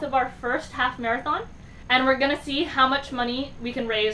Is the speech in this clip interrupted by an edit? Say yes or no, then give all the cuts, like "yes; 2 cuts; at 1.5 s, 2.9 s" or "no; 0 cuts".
yes; 1 cut; at 1.7 s